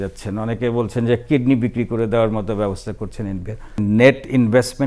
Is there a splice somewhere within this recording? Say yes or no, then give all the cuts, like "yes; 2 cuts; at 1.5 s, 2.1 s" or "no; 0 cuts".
yes; 1 cut; at 3.8 s